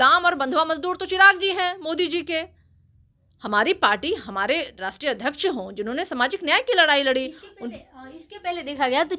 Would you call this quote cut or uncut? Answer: uncut